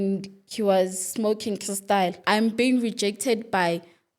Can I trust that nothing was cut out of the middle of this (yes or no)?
no